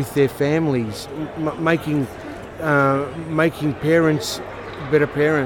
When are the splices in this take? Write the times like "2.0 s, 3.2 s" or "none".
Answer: none

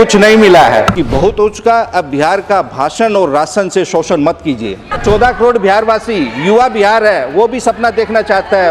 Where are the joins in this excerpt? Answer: 1.0 s, 4.9 s

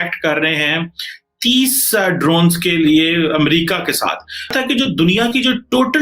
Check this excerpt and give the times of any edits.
4.5 s

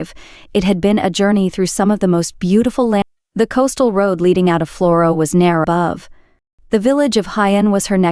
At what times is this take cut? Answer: 3.0 s, 5.6 s

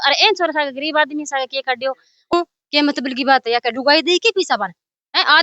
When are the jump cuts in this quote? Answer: 2.3 s

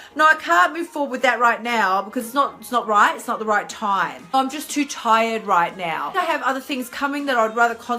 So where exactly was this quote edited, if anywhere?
4.3 s, 6.1 s

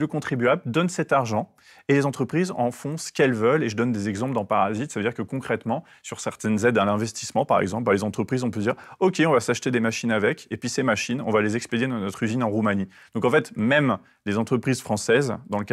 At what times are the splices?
none

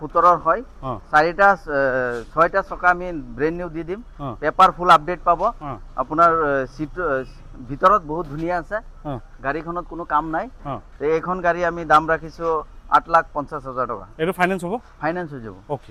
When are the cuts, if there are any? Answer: none

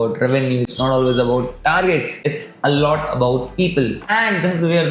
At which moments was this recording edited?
2.1 s

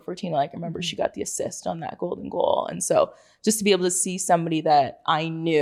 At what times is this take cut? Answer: none

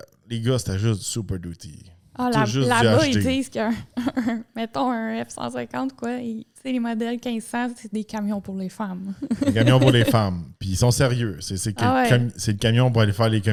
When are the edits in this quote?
none

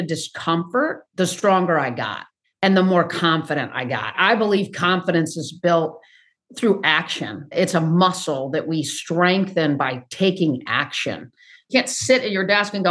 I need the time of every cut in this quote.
1.0 s, 11.7 s

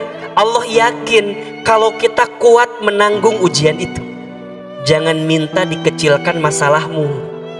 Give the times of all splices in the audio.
none

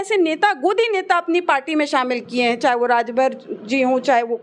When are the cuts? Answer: none

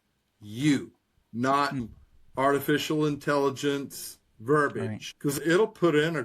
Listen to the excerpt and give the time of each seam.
1.8 s, 5.1 s

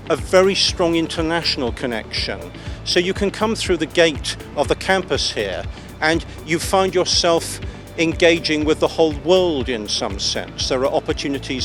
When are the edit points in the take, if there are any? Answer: none

